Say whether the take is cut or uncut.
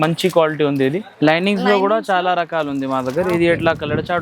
cut